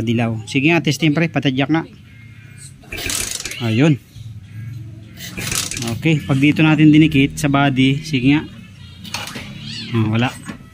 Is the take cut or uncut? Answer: uncut